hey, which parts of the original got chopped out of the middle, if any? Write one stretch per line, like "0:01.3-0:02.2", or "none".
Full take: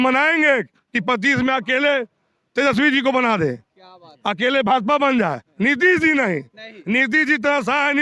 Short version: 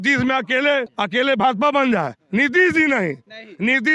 0:02.1-0:04.2

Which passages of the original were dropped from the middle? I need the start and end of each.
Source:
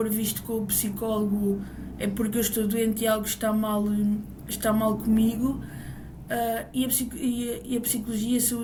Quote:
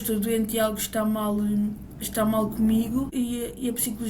0:05.6-0:07.2

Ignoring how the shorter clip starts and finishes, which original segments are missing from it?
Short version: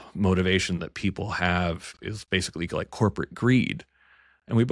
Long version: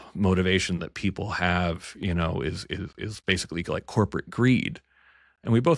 0:01.9-0:02.9

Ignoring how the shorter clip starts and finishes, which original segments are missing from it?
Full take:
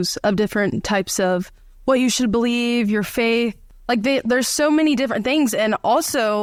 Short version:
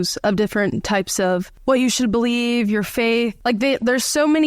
0:01.5-0:01.7
0:03.6-0:03.8

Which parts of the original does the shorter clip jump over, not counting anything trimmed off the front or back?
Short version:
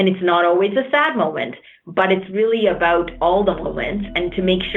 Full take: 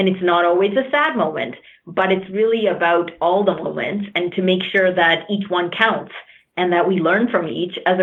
none

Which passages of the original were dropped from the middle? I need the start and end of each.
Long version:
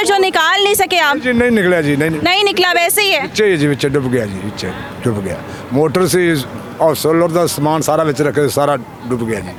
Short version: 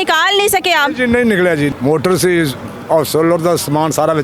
0:02.0-0:05.6

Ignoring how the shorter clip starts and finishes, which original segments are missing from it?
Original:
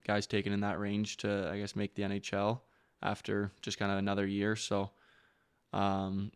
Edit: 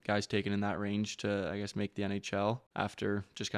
0:02.7-0:02.9

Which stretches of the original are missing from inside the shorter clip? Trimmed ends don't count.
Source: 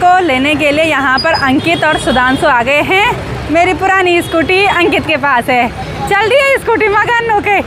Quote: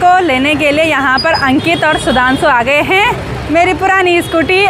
none

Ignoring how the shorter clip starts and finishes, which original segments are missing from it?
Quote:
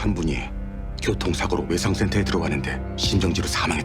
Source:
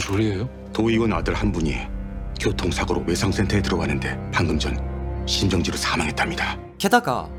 0:04.2-0:05.1

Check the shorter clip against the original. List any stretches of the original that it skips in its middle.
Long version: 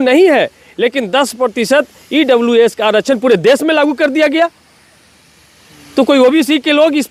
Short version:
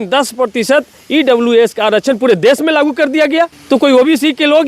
0:04.6-0:05.8

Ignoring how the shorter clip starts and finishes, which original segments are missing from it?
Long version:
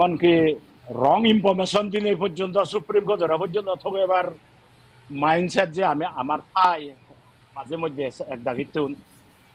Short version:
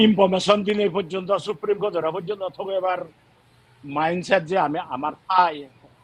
none

